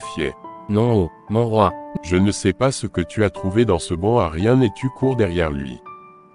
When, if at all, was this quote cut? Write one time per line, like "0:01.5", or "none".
0:01.8